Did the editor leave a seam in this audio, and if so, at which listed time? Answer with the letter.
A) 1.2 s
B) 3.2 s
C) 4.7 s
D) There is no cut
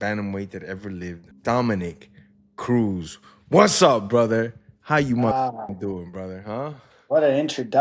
A